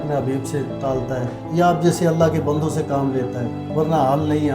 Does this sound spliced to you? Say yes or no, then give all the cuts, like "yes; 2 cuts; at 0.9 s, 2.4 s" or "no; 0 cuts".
yes; 2 cuts; at 1.0 s, 3.6 s